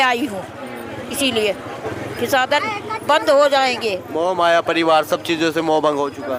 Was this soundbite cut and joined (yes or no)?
no